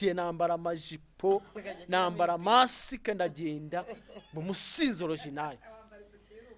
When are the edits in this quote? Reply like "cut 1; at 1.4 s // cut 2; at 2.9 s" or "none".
none